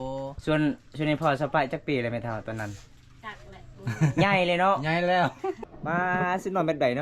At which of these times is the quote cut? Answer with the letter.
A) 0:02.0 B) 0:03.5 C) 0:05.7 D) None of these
C